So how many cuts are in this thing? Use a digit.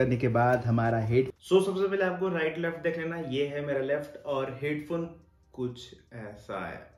1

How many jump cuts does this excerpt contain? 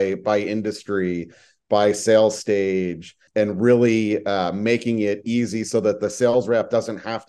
1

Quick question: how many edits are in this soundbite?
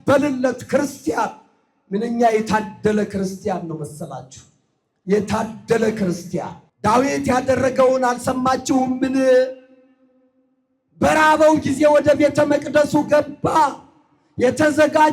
1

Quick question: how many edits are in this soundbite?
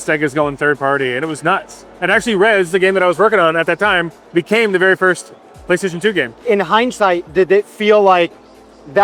0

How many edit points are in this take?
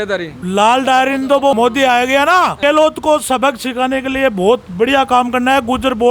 2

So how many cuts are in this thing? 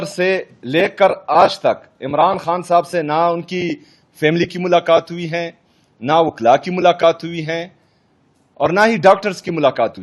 0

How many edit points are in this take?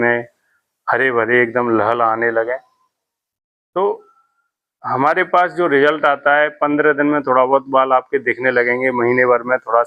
0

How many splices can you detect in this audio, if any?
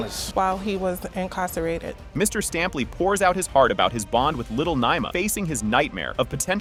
0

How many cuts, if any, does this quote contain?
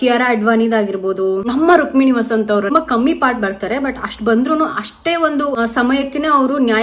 1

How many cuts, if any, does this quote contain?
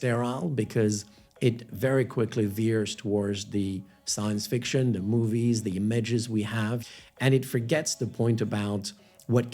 1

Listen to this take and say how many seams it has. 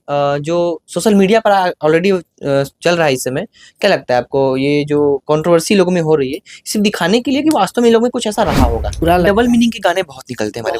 1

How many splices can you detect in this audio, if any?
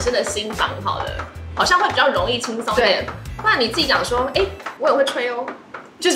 0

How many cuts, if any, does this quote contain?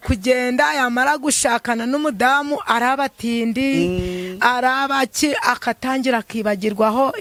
0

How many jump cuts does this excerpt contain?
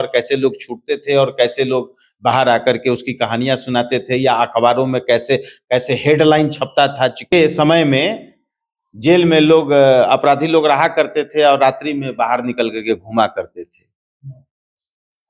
1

